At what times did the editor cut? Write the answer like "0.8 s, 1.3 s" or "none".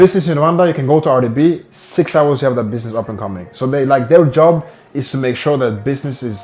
none